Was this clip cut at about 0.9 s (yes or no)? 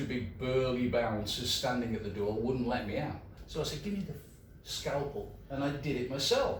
no